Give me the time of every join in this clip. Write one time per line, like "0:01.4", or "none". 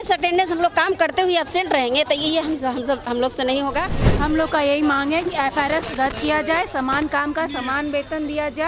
0:04.0

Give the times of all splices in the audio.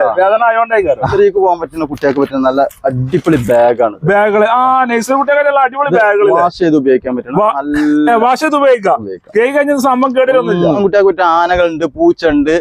0:01.1
0:10.8

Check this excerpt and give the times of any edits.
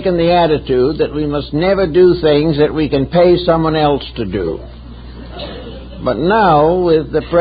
0:01.8

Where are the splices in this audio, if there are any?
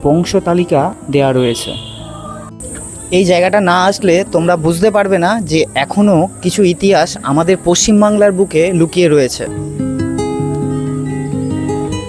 0:01.0
0:02.6
0:09.5

